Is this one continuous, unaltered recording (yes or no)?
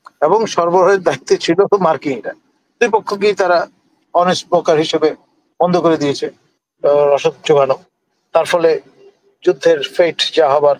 yes